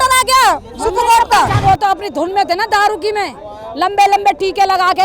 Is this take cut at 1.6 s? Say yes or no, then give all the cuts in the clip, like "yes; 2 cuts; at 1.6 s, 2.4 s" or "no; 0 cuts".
yes; 1 cut; at 1.6 s